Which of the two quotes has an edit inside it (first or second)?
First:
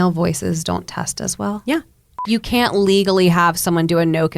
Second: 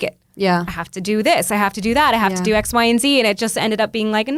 first